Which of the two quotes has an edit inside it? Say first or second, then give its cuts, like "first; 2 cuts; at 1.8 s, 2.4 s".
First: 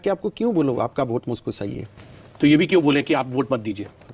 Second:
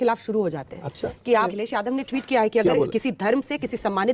second; 1 cut; at 1.5 s